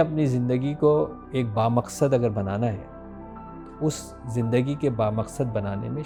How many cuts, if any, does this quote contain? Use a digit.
0